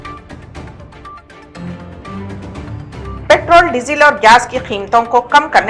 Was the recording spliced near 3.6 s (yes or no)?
no